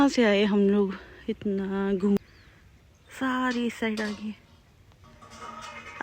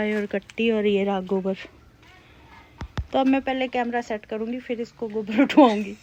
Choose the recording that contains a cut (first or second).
first